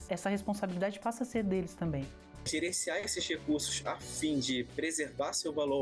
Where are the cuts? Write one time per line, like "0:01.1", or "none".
0:02.5